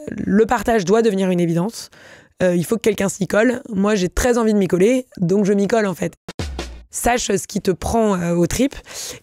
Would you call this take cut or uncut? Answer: cut